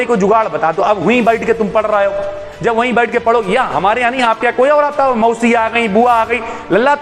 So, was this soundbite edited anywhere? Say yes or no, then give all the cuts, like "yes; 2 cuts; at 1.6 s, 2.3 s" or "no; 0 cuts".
no; 0 cuts